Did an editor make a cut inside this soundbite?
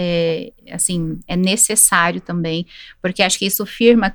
no; 0 cuts

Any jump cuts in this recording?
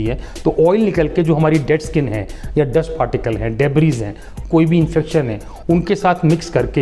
no; 0 cuts

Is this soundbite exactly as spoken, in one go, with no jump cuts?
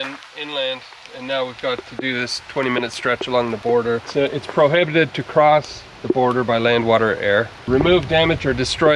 no; 2 cuts; at 4.1 s, 7.6 s

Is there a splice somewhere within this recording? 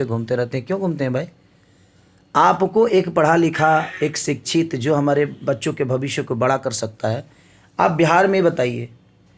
no; 0 cuts

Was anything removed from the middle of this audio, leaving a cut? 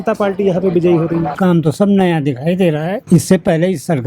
yes; 2 cuts; at 1.3 s, 3.0 s

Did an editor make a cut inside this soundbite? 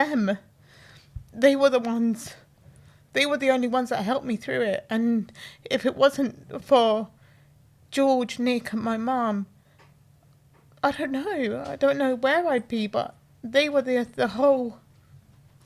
no; 0 cuts

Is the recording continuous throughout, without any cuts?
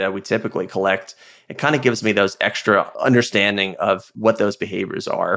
no; 2 cuts; at 2.9 s, 4.1 s

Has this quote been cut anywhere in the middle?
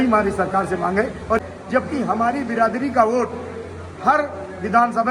yes; 1 cut; at 1.4 s

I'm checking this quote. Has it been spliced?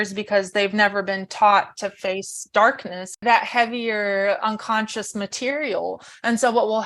yes; 1 cut; at 3.2 s

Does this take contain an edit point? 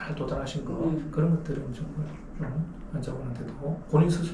no; 0 cuts

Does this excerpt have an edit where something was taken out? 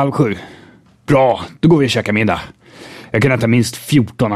no; 0 cuts

